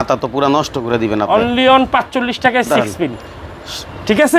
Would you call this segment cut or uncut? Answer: uncut